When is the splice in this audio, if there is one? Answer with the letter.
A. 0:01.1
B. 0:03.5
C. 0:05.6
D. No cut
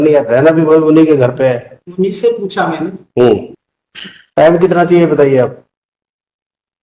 B